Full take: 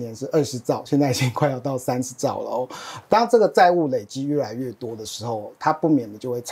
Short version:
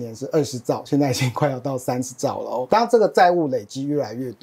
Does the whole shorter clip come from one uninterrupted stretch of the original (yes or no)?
no